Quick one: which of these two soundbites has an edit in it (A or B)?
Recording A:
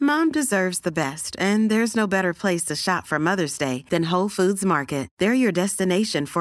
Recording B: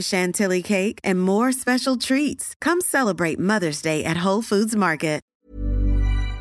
B